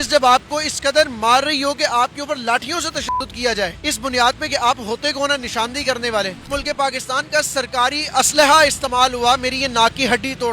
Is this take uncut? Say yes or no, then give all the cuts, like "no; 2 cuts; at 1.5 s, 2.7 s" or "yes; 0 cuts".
no; 2 cuts; at 3.8 s, 6.4 s